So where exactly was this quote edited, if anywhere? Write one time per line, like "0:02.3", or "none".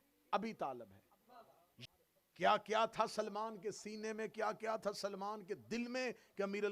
0:01.8